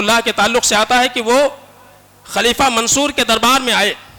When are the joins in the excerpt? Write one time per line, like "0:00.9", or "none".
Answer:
none